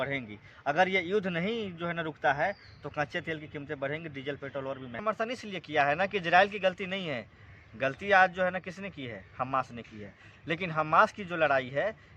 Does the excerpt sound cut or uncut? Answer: cut